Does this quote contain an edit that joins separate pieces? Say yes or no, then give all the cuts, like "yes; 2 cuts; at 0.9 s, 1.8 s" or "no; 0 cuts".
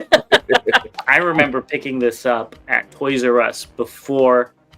yes; 1 cut; at 0.9 s